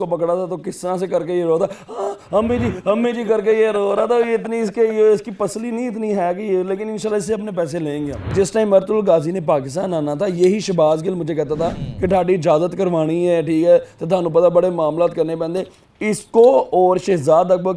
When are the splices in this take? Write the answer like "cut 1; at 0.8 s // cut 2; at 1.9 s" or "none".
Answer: cut 1; at 8.3 s // cut 2; at 11.9 s